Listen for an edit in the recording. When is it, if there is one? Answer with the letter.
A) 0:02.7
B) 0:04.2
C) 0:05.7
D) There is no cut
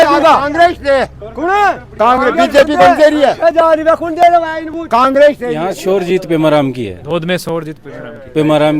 C